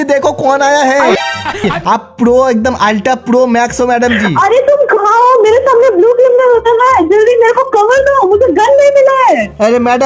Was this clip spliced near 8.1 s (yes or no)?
no